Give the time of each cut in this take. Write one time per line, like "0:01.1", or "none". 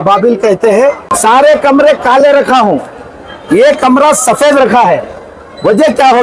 0:01.1

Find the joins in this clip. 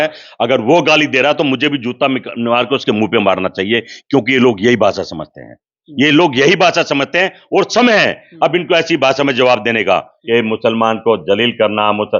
0:10.1

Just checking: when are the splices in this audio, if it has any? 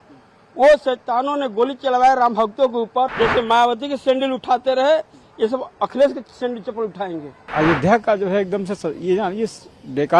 0:03.1
0:07.5

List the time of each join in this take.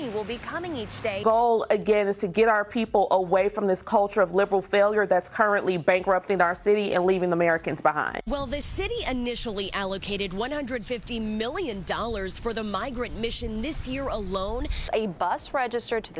0:01.2
0:08.1
0:14.9

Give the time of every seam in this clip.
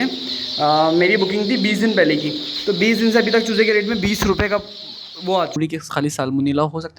0:05.6

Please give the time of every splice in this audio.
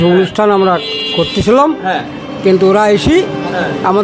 none

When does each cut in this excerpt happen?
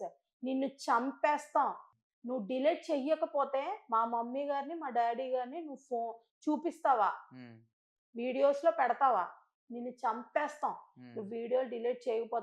0:01.9

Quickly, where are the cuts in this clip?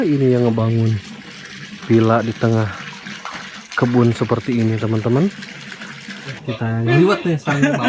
0:06.4

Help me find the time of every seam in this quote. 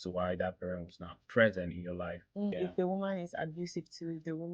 0:02.5

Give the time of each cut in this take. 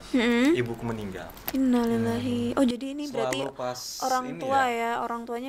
none

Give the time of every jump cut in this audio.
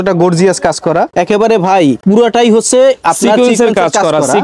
0:01.1
0:02.0

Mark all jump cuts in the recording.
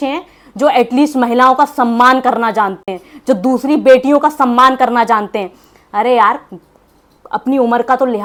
none

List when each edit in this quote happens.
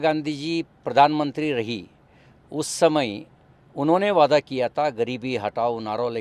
none

